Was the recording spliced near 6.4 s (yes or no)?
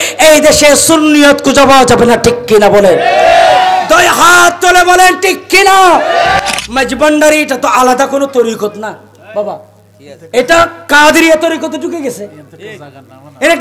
yes